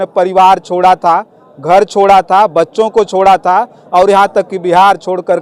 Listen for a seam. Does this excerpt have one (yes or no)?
no